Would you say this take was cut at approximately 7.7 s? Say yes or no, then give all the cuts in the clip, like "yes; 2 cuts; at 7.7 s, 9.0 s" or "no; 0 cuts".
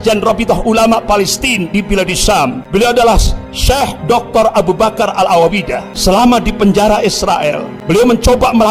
yes; 3 cuts; at 2.2 s, 5.9 s, 7.7 s